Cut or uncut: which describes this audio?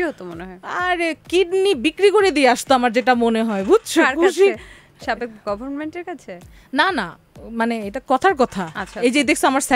uncut